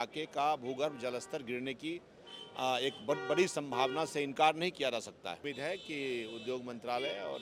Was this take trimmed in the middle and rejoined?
yes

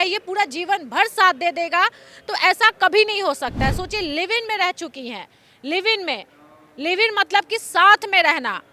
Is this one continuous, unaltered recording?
yes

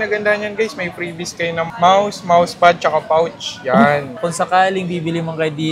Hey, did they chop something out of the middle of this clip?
yes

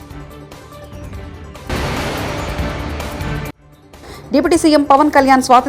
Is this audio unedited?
no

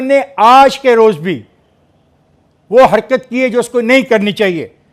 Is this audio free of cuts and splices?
yes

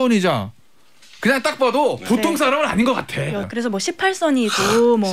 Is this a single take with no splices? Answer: no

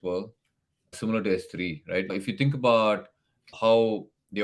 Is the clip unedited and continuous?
no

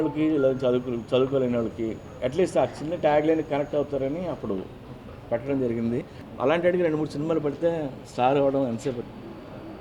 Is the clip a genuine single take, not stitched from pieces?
no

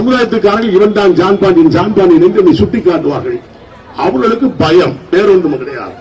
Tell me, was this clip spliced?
no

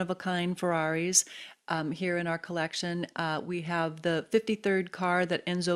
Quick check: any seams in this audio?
no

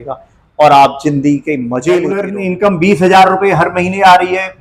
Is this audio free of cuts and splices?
no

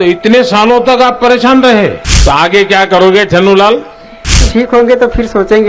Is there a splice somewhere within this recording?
yes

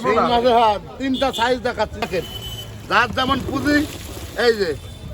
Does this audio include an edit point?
yes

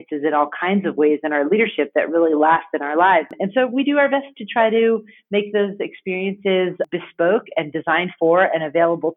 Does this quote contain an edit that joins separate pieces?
yes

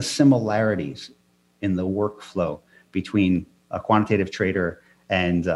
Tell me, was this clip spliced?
no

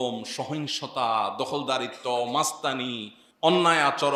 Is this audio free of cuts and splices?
yes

